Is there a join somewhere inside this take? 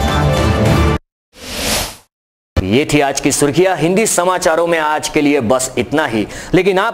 no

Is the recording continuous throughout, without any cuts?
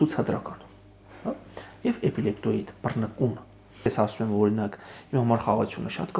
no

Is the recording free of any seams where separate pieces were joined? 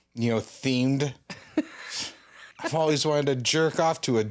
no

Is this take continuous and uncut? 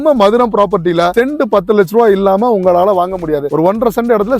no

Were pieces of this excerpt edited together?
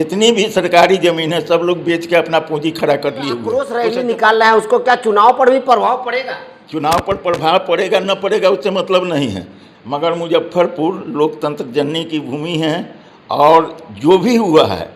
yes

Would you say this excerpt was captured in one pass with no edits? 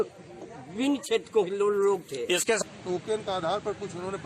no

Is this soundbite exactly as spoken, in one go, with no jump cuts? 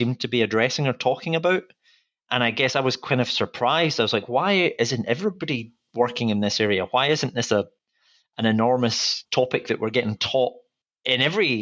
no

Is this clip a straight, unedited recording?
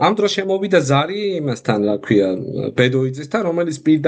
yes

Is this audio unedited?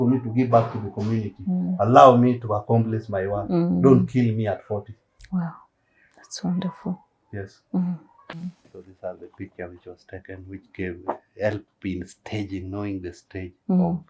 no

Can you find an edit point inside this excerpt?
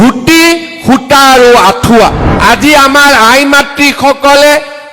yes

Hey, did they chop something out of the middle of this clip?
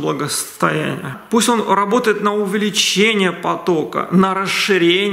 no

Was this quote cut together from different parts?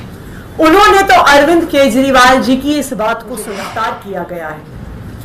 yes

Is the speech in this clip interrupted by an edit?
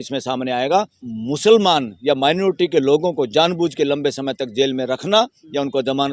yes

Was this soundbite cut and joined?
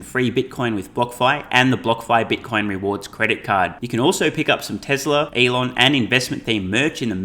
yes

